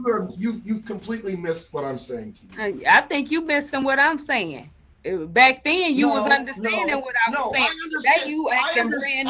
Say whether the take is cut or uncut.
uncut